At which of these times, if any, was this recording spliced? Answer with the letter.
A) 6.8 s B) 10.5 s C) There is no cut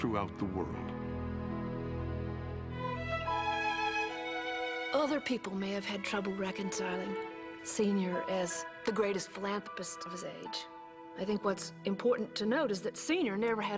A